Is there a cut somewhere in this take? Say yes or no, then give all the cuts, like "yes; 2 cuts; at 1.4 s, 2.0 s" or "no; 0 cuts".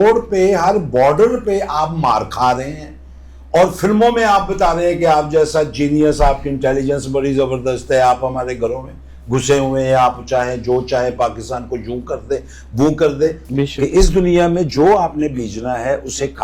yes; 1 cut; at 13.4 s